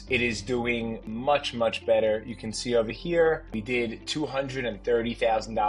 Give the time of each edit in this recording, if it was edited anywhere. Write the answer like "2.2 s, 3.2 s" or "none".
1.0 s, 3.5 s